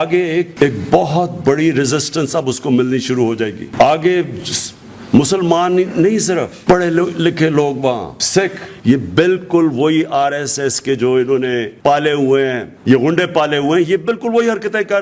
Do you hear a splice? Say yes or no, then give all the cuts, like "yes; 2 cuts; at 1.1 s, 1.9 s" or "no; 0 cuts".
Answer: yes; 3 cuts; at 8.7 s, 11.7 s, 12.7 s